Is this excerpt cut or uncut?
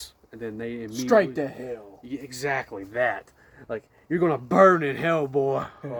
uncut